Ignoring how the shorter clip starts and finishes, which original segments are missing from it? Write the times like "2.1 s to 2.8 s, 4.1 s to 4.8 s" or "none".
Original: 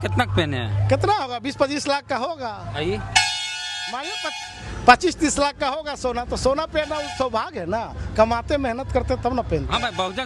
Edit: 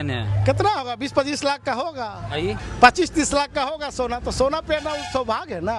3.0 s to 4.7 s